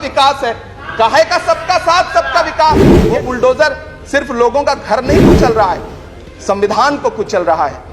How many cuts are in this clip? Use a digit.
1